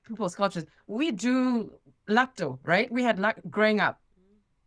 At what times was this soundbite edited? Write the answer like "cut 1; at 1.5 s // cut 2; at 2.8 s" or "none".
none

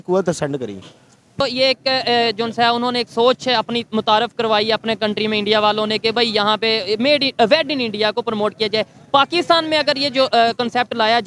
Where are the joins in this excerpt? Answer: cut 1; at 1.4 s

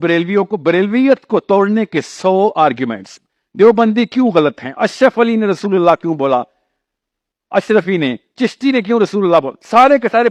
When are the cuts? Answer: none

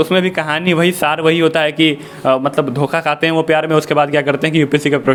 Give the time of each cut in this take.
none

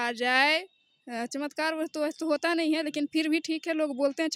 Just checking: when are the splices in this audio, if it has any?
none

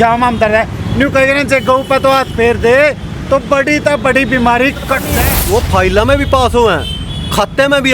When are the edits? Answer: cut 1; at 5.2 s

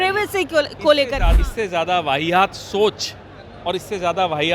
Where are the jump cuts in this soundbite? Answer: cut 1; at 1.3 s

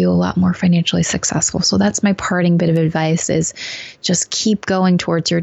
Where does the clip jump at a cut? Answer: none

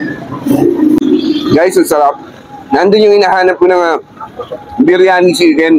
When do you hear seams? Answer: cut 1; at 1.0 s

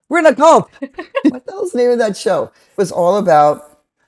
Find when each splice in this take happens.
cut 1; at 1.3 s // cut 2; at 2.7 s

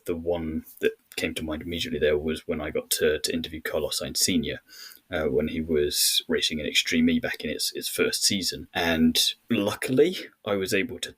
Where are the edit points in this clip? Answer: cut 1; at 6.2 s // cut 2; at 8.6 s // cut 3; at 9.3 s

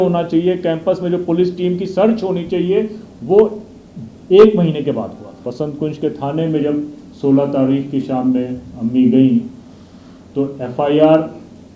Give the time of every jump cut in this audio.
cut 1; at 5.3 s

